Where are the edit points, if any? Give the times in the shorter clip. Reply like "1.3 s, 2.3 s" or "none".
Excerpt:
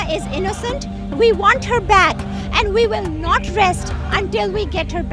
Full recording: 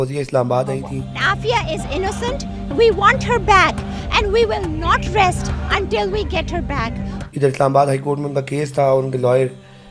none